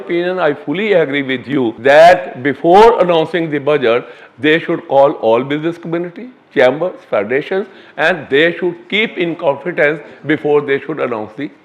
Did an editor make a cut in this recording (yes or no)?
yes